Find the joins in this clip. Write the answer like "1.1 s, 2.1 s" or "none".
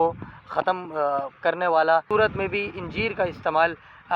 2.1 s